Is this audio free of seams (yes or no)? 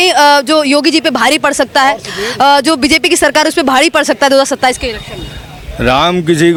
yes